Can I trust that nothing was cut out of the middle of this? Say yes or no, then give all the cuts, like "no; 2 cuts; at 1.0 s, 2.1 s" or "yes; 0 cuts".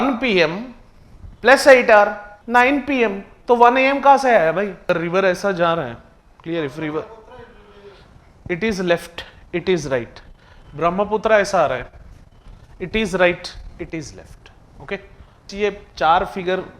no; 2 cuts; at 4.9 s, 15.5 s